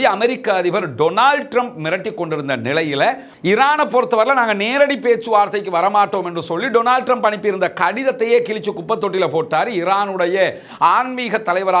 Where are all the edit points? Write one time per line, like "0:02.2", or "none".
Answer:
0:03.3